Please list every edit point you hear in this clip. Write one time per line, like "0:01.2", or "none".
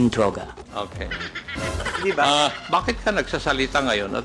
0:02.6

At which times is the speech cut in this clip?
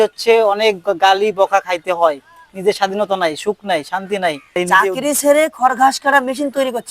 0:04.6

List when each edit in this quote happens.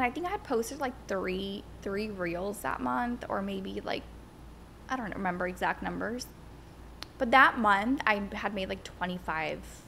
none

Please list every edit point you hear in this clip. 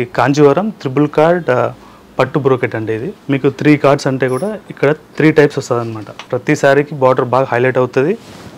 0:03.1
0:06.2

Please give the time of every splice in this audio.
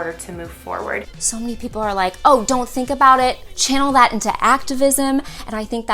0:01.0

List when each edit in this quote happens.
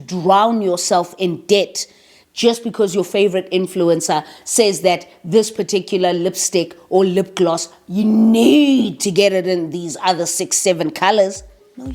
none

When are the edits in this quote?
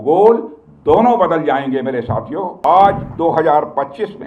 0:02.6

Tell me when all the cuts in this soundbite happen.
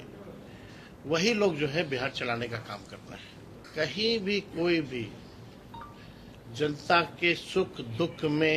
0:03.6

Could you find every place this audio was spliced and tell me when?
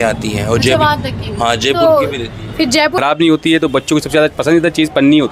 0:02.9

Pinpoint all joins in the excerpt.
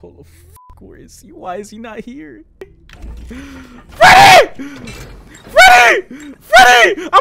0:02.8

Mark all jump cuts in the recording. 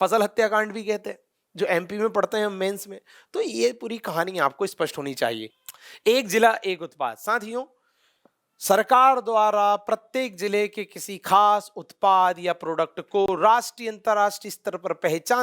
0:05.6

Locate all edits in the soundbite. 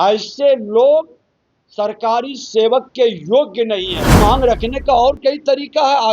0:04.1

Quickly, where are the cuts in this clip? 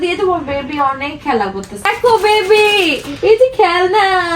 0:01.9

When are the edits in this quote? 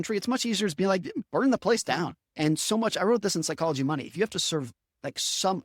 0:02.2

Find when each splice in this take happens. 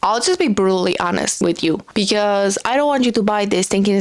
0:01.6

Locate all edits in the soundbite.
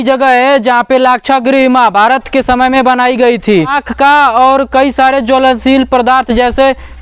0:03.8

